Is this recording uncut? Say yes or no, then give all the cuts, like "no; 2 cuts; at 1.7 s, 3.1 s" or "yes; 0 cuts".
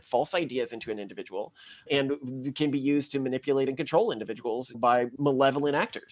no; 1 cut; at 5.1 s